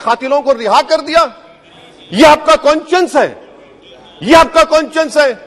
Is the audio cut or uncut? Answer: uncut